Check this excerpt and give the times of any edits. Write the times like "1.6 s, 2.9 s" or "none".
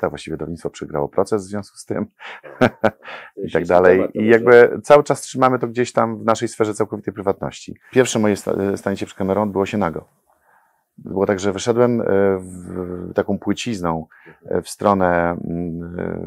7.8 s